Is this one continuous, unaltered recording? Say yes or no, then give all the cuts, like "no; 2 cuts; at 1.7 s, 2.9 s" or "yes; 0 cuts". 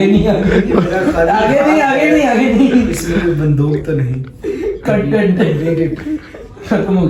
yes; 0 cuts